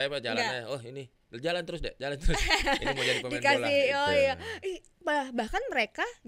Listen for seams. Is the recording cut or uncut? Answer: uncut